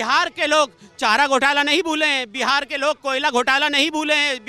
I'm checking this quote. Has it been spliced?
no; 0 cuts

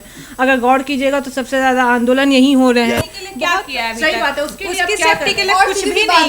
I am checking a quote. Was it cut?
yes; 1 cut; at 3.3 s

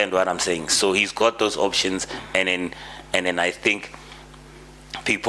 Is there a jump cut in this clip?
no; 0 cuts

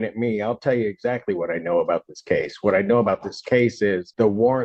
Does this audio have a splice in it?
no; 0 cuts

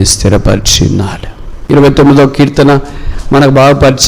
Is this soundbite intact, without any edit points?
no; 1 cut; at 1.6 s

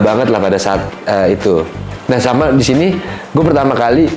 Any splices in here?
yes; 1 cut; at 1.9 s

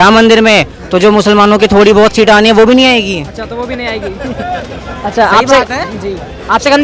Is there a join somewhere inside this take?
no; 0 cuts

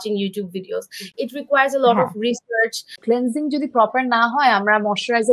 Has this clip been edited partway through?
yes; 1 cut; at 2.9 s

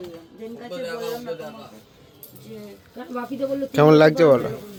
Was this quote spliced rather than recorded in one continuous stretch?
no; 0 cuts

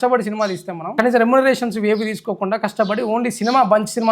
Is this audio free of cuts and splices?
no; 1 cut; at 0.9 s

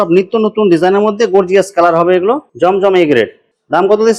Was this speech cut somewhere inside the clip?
no; 0 cuts

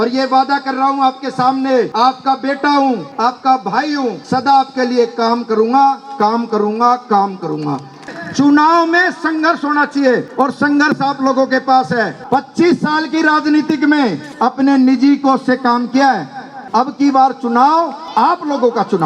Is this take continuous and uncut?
no; 9 cuts; at 1.9 s, 3.1 s, 4.2 s, 8.0 s, 10.3 s, 12.2 s, 14.2 s, 16.5 s, 18.0 s

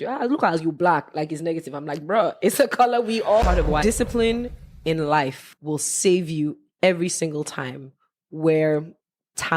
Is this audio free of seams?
no; 2 cuts; at 3.4 s, 5.5 s

